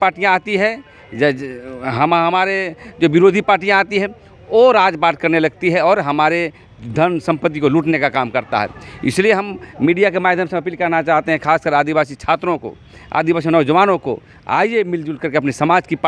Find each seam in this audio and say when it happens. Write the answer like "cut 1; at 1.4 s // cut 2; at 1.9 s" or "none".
none